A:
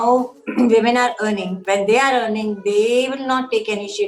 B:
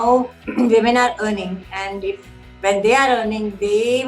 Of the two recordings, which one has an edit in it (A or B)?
A